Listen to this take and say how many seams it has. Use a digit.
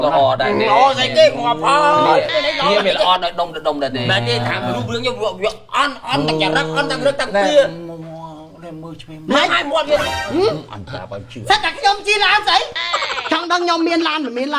1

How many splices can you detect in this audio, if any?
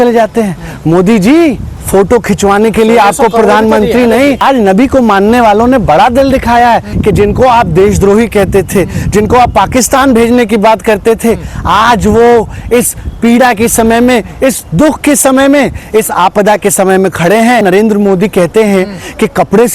3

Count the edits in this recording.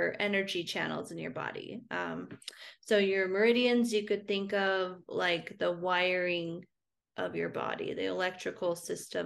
0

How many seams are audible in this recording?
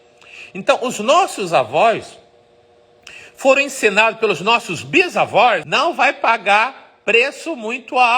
1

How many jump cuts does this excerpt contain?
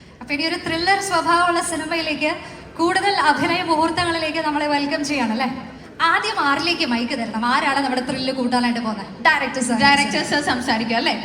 0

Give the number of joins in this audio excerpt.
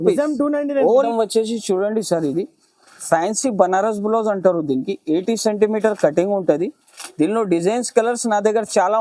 1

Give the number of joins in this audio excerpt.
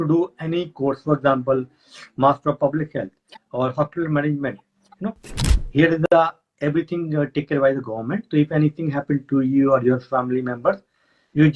1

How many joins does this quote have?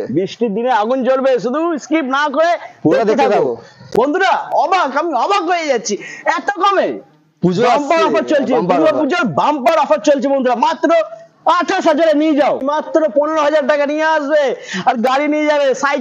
2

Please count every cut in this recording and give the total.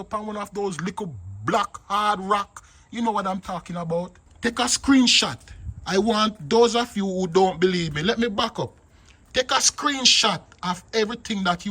1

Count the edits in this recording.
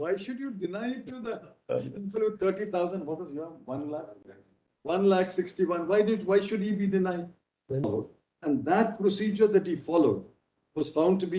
1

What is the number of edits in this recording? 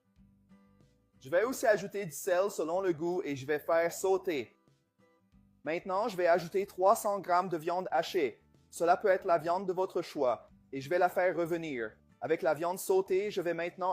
1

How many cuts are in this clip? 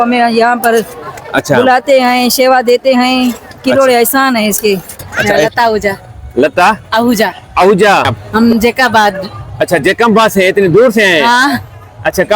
2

